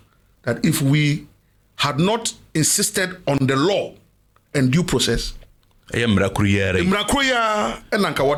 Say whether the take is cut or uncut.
uncut